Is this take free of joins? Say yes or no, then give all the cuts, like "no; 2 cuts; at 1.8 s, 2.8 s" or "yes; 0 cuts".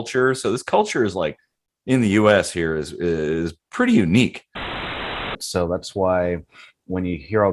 no; 1 cut; at 4.9 s